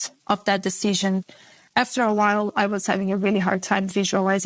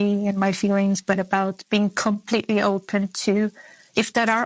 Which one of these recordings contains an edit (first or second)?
first